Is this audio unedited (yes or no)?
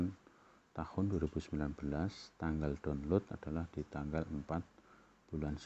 yes